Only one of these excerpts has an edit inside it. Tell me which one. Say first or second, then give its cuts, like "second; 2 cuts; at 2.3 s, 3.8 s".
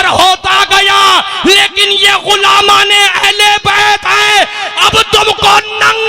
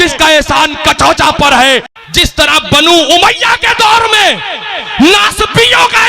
second; 1 cut; at 2.0 s